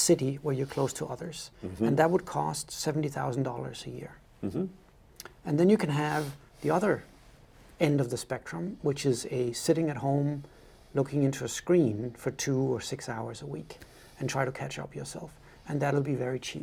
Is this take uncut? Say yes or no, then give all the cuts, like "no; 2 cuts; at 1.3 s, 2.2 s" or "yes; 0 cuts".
yes; 0 cuts